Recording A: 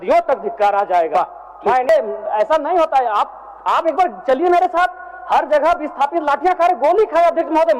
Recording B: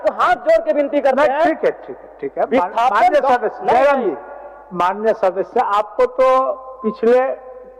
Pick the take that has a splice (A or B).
A